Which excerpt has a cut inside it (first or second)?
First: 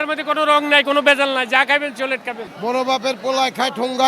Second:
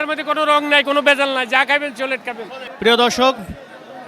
first